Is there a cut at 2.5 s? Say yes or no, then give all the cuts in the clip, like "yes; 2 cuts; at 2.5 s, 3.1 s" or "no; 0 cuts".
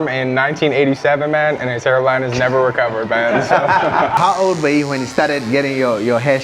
no; 1 cut; at 4.2 s